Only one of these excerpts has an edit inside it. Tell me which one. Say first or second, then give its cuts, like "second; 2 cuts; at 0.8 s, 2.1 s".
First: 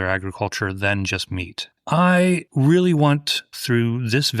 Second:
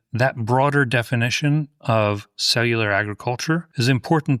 first; 1 cut; at 1.8 s